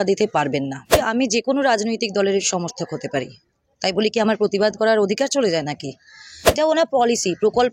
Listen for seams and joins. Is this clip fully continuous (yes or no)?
no